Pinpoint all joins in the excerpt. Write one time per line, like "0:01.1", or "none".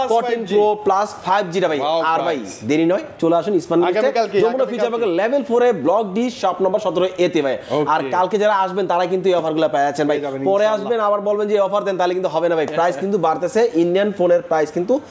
none